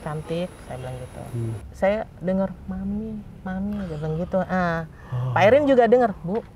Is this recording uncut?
no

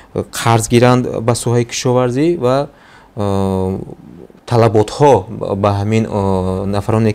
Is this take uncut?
yes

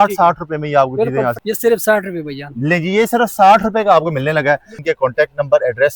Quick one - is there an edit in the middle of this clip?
yes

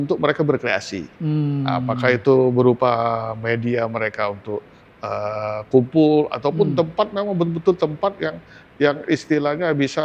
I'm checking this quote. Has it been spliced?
no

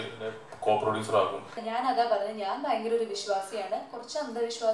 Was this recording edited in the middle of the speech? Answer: yes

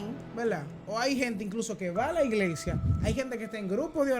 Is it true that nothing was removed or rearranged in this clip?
yes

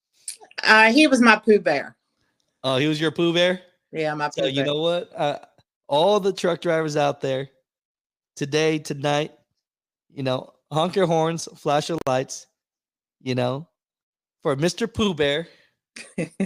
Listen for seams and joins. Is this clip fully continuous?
yes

